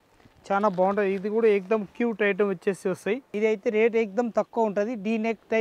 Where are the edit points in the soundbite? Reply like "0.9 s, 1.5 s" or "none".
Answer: 3.3 s